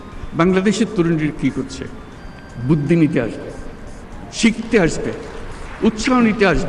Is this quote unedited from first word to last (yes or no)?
yes